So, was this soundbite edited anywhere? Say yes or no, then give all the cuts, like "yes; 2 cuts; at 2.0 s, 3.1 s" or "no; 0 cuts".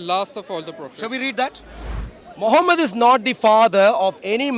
yes; 1 cut; at 1.7 s